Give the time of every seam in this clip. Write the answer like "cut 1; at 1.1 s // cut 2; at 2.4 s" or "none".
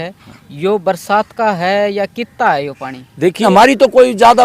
cut 1; at 3.4 s